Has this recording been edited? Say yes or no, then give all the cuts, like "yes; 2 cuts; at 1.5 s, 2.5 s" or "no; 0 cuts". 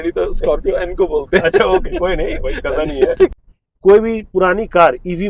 yes; 1 cut; at 3.3 s